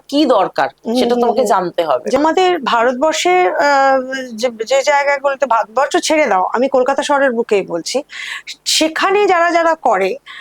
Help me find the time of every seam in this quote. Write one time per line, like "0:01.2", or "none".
0:02.2

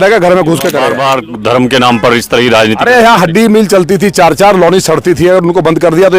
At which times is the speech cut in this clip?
0:01.0

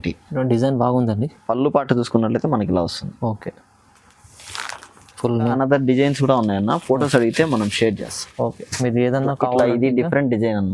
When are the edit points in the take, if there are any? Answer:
0:05.5

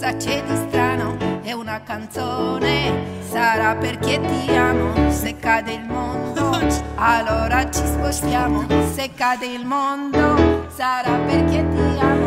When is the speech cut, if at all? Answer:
none

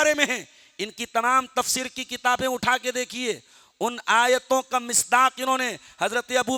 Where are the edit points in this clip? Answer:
none

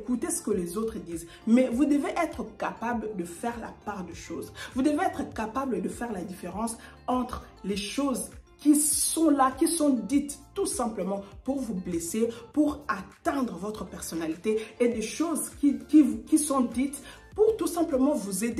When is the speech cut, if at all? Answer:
none

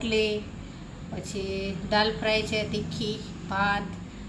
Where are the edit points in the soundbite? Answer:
none

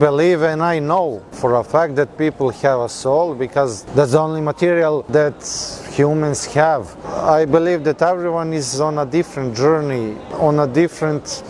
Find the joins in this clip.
0:01.3
0:03.8
0:05.0
0:07.1
0:10.2

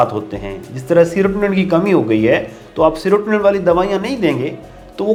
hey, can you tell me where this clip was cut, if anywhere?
none

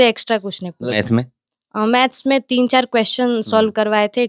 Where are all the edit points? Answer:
0:00.9

